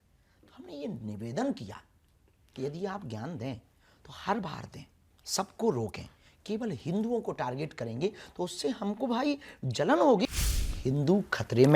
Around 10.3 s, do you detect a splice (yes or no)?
yes